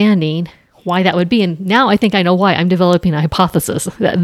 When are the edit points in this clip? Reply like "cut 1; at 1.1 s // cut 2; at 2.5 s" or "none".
none